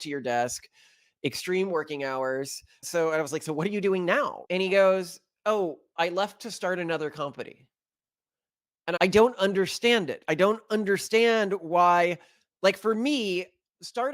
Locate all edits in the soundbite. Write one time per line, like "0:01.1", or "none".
0:02.8
0:08.9